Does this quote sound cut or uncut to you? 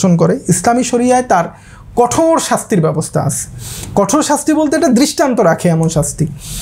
uncut